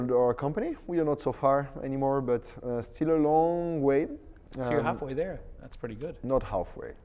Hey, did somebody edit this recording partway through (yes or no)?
no